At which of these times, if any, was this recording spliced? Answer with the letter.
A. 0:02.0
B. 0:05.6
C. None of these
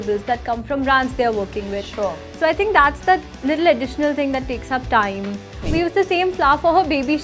B